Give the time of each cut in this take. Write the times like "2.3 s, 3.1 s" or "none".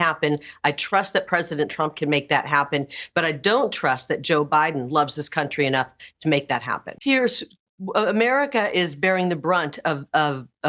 6.8 s